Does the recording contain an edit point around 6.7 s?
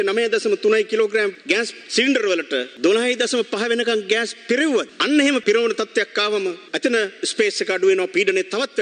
yes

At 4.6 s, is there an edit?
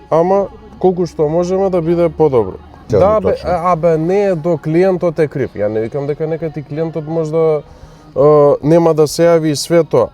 no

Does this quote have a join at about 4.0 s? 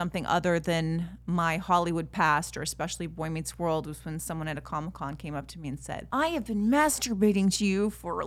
no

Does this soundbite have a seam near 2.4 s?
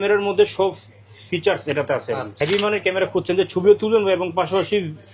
yes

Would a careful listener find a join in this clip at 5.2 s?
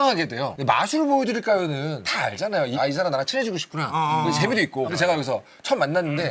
no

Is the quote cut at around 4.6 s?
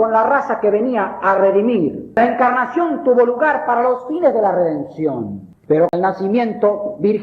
no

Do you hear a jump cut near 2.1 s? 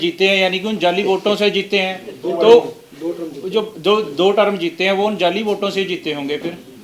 no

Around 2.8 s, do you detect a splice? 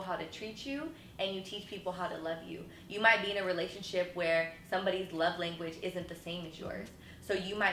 no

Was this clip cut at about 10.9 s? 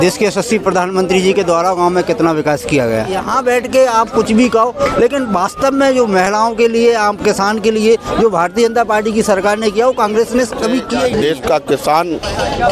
yes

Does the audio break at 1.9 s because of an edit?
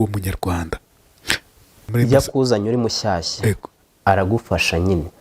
yes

